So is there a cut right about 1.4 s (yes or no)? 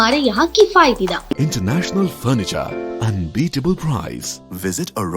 yes